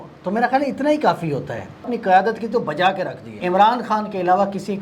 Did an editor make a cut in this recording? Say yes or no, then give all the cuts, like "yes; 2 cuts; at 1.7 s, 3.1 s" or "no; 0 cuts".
yes; 2 cuts; at 1.9 s, 3.4 s